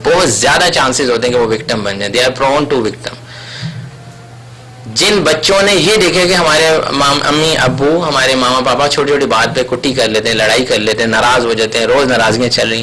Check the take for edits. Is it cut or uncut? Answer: uncut